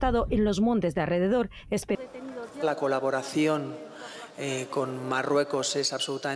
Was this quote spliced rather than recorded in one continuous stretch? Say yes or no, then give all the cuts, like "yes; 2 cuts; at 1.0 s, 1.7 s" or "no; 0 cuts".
yes; 1 cut; at 2.0 s